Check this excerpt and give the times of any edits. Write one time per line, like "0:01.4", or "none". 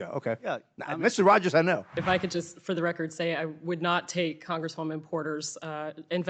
0:01.9